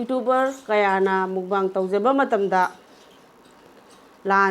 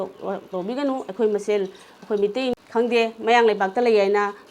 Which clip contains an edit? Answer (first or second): second